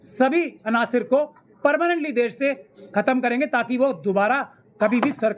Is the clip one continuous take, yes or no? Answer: yes